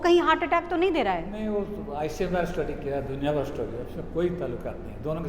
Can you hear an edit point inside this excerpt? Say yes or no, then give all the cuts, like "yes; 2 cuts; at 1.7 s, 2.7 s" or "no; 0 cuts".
no; 0 cuts